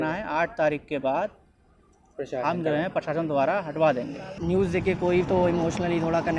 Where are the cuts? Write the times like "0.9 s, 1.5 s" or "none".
4.4 s